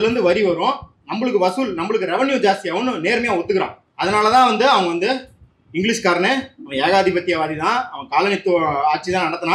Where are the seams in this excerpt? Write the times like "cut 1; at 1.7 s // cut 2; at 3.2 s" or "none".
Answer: cut 1; at 3.8 s